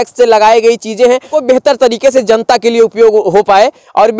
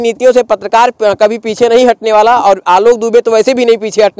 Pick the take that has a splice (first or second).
first